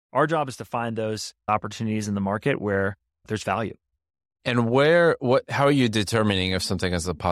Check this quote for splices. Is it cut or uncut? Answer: uncut